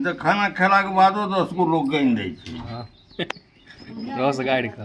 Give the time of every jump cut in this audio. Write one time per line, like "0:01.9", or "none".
none